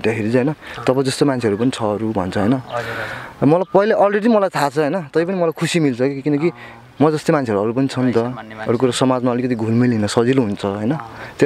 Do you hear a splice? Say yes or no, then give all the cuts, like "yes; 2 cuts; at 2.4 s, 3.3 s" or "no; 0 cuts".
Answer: no; 0 cuts